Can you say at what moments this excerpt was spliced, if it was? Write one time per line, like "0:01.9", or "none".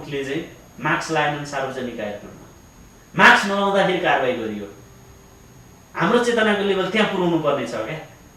none

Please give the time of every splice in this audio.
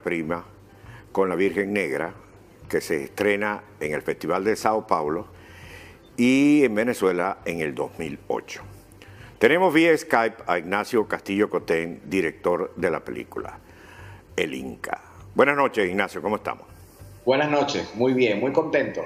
0:03.6

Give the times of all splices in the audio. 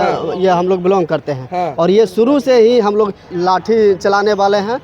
0:03.2

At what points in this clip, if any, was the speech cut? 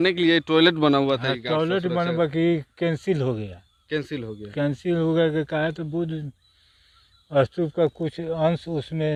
none

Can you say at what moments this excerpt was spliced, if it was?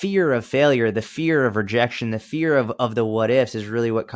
none

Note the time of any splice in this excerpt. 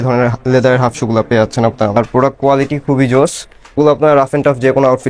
0:02.0
0:03.8

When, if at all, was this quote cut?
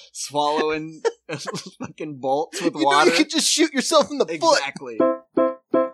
0:04.9

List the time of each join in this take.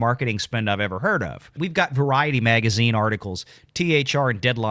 0:01.5

